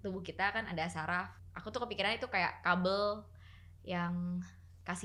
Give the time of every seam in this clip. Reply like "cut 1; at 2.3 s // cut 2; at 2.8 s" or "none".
none